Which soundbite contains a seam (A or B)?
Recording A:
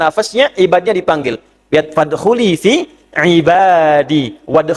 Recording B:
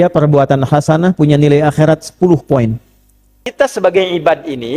B